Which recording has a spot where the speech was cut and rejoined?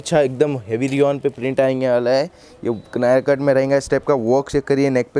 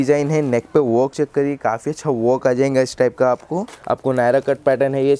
second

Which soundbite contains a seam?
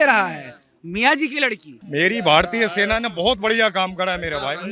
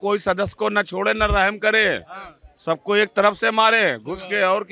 first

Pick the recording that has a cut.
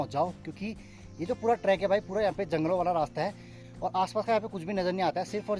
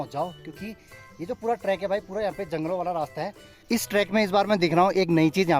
second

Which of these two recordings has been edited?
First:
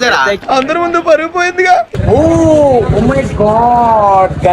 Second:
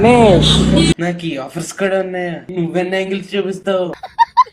first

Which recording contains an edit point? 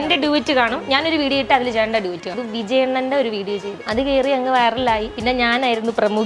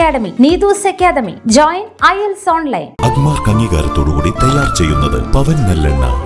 first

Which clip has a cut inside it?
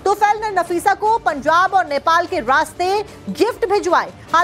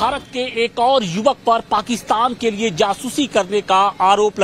first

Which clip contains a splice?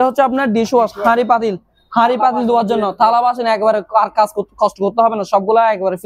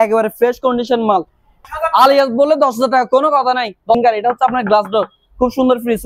second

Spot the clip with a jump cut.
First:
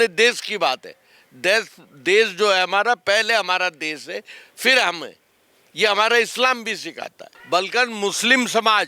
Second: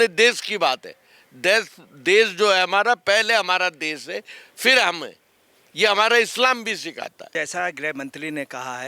first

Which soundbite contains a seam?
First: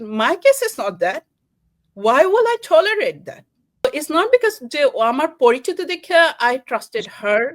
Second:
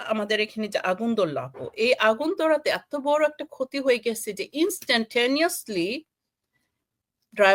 first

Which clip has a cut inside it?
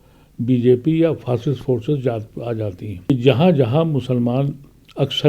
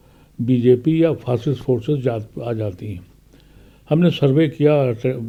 first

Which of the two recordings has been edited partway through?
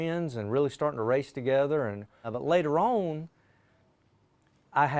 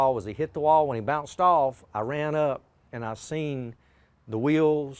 first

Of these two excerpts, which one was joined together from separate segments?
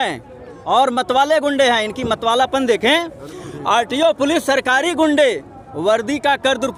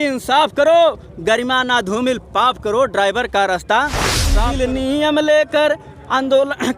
second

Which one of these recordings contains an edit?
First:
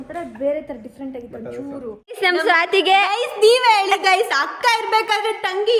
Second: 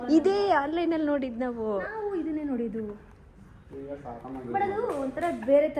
first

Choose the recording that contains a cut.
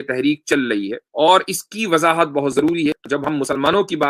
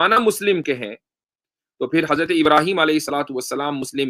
first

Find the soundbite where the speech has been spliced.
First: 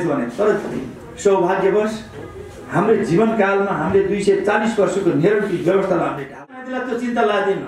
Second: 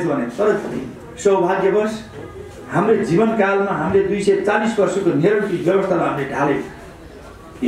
first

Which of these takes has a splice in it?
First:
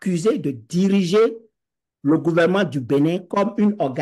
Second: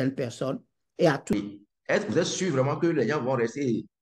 second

